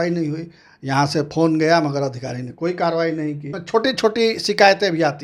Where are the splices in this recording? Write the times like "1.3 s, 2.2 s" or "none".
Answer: 3.5 s